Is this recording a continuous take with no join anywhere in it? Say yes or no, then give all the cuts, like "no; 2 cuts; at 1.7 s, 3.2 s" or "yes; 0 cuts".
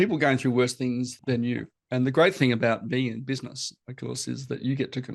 no; 1 cut; at 1.1 s